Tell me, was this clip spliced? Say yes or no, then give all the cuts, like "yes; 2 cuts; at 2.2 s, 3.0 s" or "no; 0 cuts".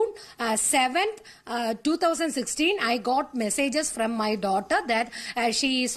no; 0 cuts